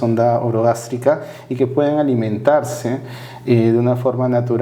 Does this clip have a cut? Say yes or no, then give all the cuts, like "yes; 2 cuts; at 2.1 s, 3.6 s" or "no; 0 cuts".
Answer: no; 0 cuts